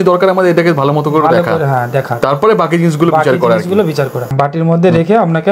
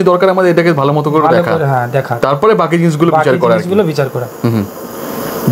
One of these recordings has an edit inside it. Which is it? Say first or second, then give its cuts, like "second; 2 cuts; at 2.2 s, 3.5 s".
first; 1 cut; at 4.3 s